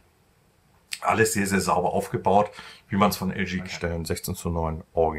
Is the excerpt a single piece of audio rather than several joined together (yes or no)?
no